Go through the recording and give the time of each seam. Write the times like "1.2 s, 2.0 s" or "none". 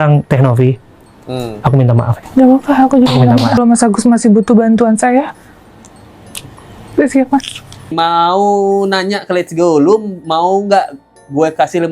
3.6 s, 7.9 s